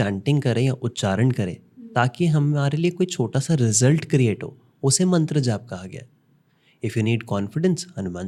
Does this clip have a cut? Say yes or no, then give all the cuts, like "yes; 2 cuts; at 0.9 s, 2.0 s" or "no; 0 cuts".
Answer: no; 0 cuts